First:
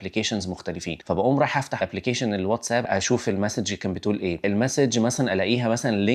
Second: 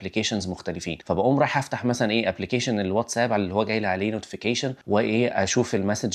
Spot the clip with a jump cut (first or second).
first